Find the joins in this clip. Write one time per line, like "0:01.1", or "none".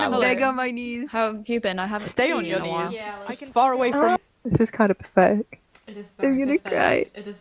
0:04.2